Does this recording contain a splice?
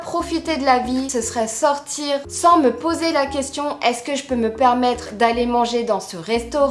yes; 2 cuts; at 1.1 s, 2.3 s

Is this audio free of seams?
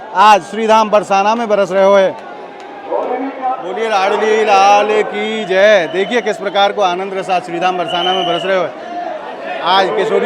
no; 1 cut; at 3.7 s

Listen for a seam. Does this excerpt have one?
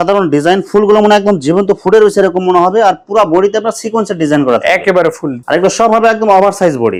no; 0 cuts

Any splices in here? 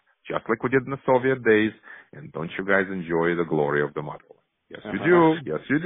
no; 0 cuts

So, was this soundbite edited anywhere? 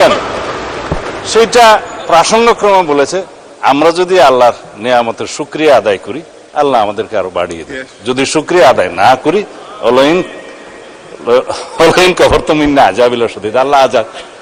no; 0 cuts

